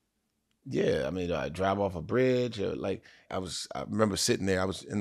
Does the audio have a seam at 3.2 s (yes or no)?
yes